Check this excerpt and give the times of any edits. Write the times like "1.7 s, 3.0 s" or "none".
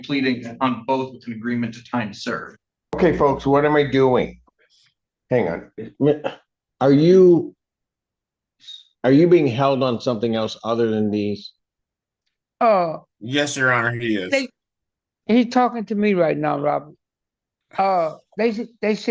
2.9 s